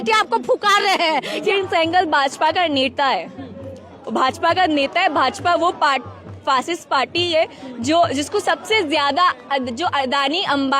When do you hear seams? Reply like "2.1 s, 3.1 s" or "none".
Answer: 1.5 s